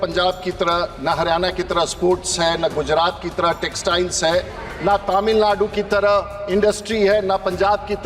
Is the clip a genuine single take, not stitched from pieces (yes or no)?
yes